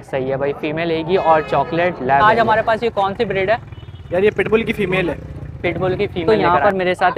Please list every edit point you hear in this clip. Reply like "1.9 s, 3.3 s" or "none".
2.2 s, 6.3 s